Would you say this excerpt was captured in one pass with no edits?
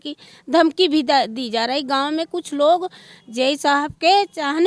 yes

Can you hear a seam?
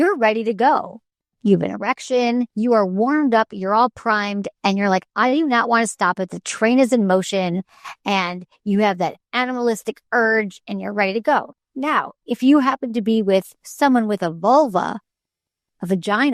no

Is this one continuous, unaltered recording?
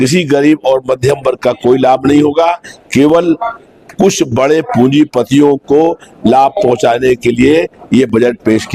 yes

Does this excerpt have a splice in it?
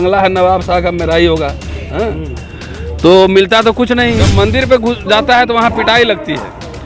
yes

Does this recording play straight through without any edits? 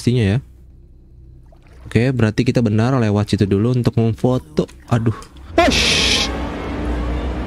yes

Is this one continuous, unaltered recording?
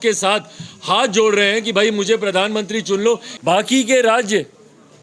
no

